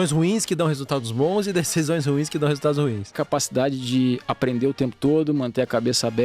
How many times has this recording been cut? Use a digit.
1